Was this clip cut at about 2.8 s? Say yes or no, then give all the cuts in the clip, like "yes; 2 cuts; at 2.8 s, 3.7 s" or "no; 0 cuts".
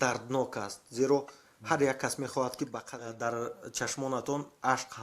yes; 1 cut; at 2.8 s